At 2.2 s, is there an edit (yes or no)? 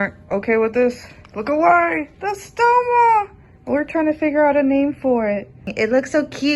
no